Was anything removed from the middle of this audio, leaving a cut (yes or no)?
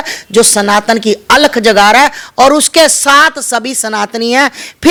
no